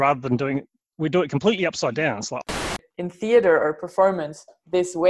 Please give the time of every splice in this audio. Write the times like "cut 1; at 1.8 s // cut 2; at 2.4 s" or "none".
cut 1; at 2.4 s